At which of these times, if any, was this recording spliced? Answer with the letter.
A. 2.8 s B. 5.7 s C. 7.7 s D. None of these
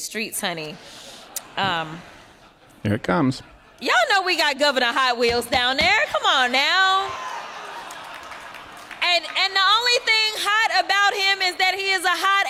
D